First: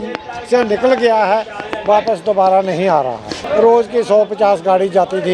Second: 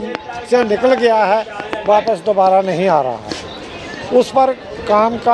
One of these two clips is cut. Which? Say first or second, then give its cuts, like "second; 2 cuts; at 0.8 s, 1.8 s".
first; 1 cut; at 3.3 s